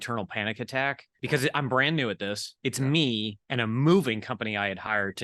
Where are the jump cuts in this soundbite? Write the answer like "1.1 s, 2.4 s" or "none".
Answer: 1.1 s, 2.5 s, 3.4 s